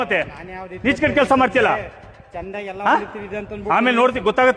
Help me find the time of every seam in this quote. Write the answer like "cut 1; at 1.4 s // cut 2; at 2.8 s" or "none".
cut 1; at 2.7 s